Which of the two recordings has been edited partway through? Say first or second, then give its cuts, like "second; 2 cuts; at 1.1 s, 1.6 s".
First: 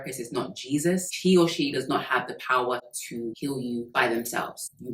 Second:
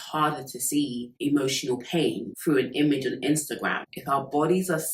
second; 2 cuts; at 1.1 s, 3.8 s